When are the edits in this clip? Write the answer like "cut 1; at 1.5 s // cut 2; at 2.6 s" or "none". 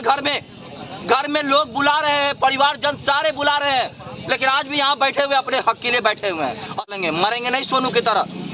cut 1; at 6.9 s